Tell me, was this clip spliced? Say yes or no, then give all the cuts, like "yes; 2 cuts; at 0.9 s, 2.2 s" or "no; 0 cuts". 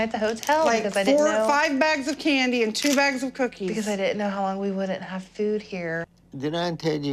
no; 0 cuts